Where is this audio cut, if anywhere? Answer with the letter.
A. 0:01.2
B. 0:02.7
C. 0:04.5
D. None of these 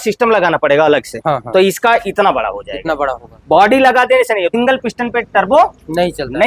C